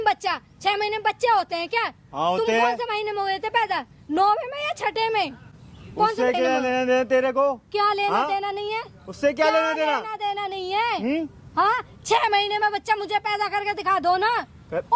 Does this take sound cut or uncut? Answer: uncut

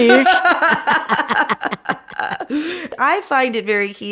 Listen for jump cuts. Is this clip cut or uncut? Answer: cut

